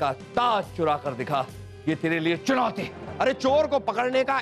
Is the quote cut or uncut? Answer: cut